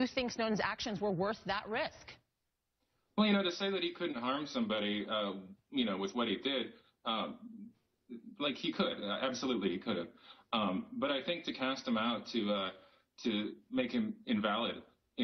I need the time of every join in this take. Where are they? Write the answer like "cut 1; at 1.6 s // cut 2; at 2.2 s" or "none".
cut 1; at 10.1 s

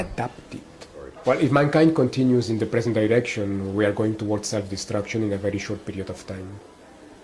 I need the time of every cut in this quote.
cut 1; at 1.1 s

